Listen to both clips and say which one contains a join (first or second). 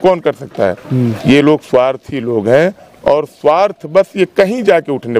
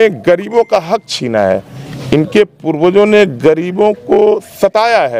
first